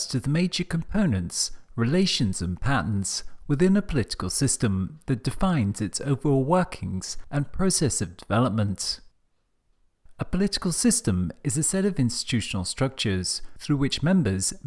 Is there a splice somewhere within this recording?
no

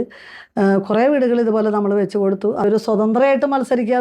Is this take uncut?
no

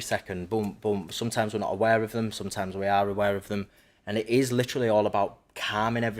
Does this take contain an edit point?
no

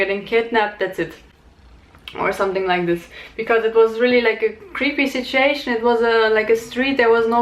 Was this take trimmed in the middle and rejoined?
no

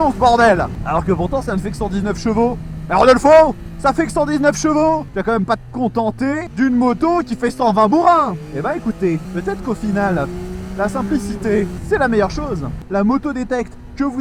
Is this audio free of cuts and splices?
no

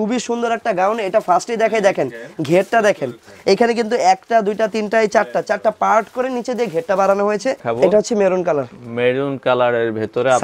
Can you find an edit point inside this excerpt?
yes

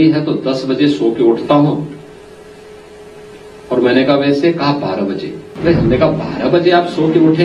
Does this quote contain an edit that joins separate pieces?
yes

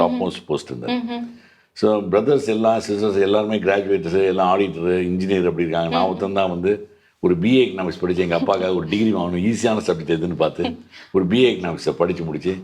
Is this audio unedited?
yes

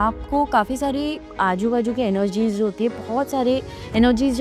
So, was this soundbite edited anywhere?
no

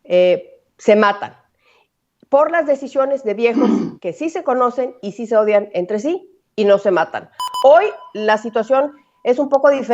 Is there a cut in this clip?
yes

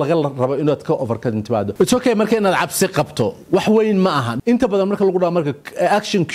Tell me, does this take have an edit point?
yes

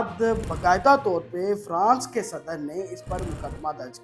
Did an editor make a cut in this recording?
no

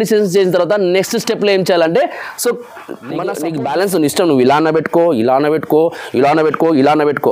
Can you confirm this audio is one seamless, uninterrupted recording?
no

